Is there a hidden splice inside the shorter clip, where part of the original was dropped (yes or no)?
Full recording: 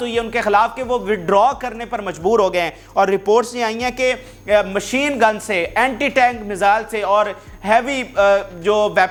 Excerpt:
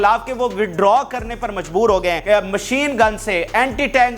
yes